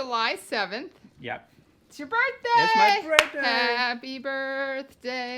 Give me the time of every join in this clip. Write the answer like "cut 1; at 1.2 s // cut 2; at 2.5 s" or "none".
none